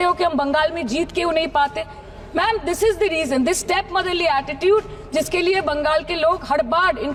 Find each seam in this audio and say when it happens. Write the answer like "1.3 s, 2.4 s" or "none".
none